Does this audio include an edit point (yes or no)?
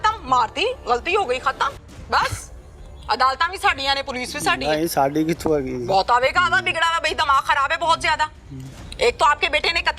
no